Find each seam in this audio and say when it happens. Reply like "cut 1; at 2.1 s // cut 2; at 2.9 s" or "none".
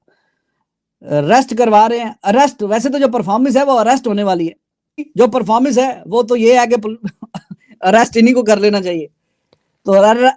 cut 1; at 5.1 s